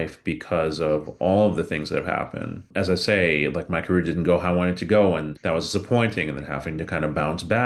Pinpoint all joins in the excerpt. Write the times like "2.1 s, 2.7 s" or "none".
2.7 s, 5.3 s